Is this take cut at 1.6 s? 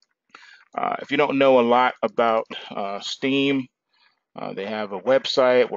yes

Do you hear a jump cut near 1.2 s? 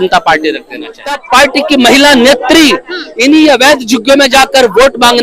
yes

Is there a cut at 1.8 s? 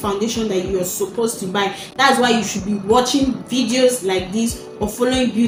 no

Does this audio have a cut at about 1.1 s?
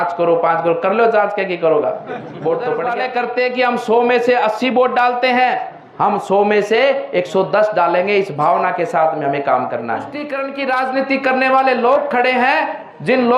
no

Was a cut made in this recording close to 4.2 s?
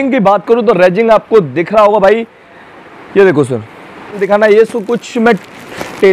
yes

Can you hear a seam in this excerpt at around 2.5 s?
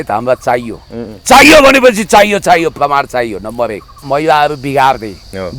no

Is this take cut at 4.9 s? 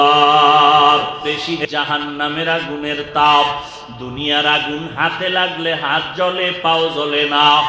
no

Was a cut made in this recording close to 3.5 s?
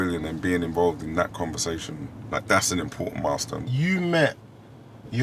yes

